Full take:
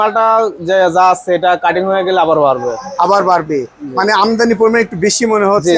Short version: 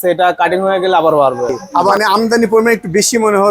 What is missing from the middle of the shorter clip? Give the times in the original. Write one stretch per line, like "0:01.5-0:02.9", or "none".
0:03.2-0:04.0

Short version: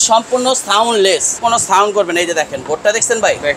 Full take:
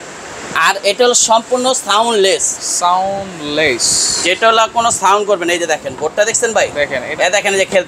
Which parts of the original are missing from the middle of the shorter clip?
0:02.6-0:04.7

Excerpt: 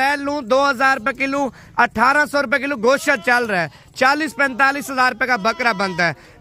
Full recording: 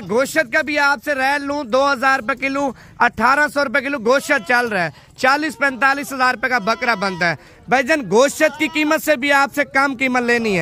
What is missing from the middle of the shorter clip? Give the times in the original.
none

